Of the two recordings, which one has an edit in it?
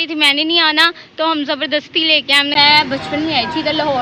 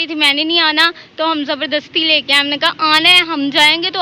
first; 1 cut; at 2.6 s

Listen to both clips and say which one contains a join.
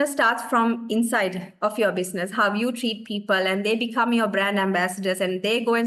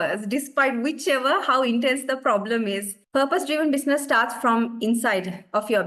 second; 1 cut; at 3.0 s

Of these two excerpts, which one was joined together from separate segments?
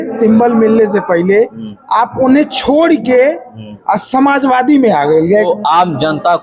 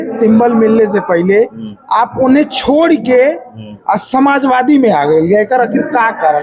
first; 1 cut; at 5.5 s

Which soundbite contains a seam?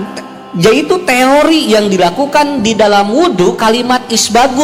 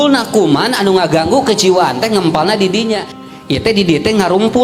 second; 1 cut; at 3.1 s

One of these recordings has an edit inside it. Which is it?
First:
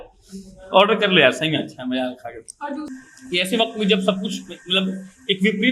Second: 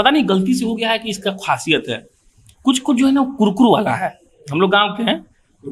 first; 1 cut; at 2.9 s

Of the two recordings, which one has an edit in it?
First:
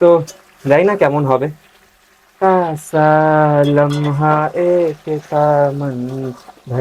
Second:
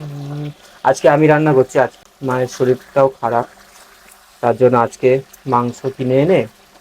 second; 1 cut; at 2.0 s

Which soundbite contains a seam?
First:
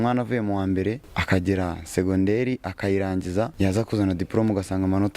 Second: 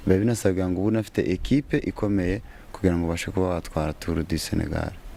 first; 2 cuts; at 1.1 s, 3.5 s

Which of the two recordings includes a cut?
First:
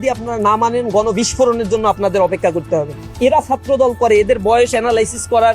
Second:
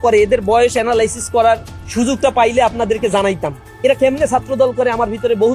first; 1 cut; at 2.9 s

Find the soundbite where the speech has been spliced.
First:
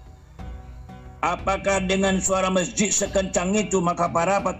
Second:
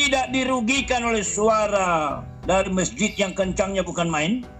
first; 1 cut; at 1.2 s

